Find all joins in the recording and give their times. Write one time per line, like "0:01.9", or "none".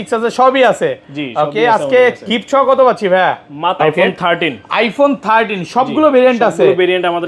0:03.8

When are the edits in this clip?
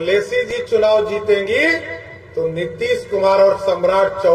none

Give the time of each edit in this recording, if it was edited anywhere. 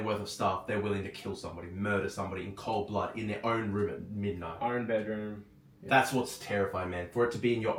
none

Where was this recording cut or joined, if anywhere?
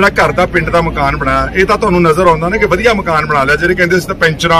none

